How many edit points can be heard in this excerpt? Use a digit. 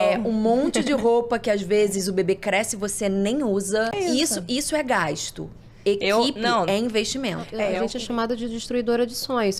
2